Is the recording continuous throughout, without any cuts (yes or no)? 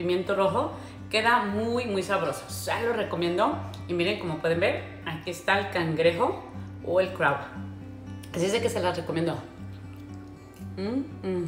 no